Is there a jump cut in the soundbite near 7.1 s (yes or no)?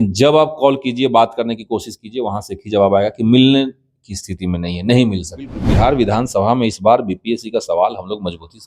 no